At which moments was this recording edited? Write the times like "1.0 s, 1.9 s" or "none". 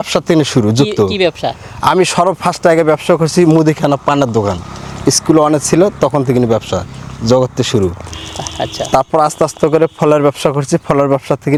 none